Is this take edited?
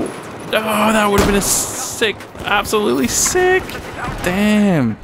yes; 1 cut; at 4.1 s

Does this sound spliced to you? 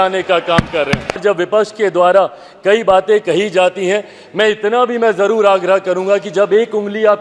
yes; 1 cut; at 1.2 s

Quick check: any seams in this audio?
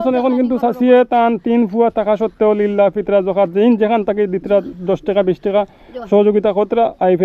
no; 0 cuts

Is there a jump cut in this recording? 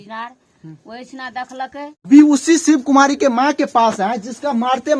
yes; 1 cut; at 2.0 s

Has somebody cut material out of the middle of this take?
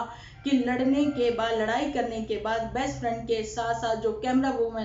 no; 0 cuts

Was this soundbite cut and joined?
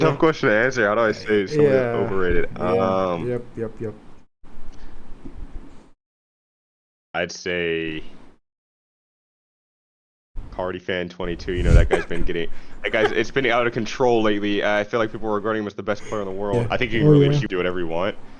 yes; 1 cut; at 17.5 s

